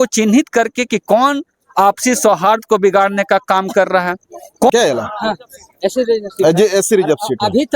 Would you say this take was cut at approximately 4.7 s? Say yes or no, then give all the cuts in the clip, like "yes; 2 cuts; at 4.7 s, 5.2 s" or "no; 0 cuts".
yes; 1 cut; at 4.7 s